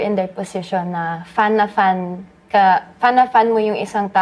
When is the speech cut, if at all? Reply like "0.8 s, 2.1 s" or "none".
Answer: none